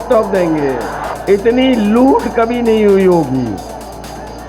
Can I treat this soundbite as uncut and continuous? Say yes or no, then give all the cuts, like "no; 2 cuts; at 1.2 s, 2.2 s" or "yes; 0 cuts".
no; 1 cut; at 1.1 s